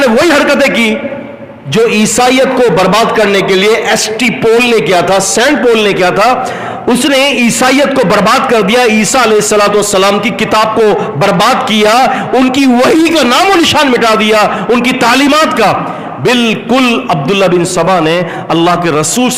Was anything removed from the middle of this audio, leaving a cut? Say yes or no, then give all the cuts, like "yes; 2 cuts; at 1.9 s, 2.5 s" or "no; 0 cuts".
no; 0 cuts